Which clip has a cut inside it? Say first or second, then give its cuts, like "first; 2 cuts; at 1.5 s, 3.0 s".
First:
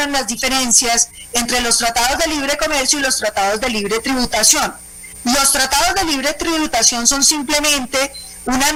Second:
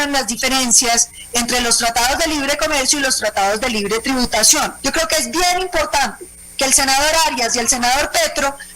second; 1 cut; at 4.8 s